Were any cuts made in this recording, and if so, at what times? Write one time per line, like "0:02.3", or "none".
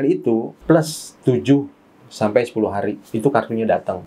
none